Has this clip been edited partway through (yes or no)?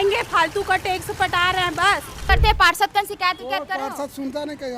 yes